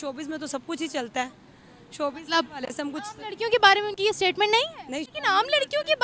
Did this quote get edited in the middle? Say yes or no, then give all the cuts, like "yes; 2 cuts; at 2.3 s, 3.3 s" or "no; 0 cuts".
yes; 1 cut; at 5.1 s